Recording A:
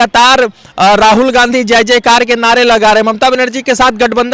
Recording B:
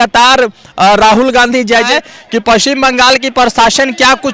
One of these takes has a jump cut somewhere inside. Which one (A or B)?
B